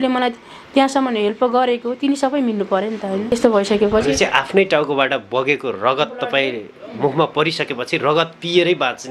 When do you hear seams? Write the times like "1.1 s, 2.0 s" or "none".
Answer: 3.3 s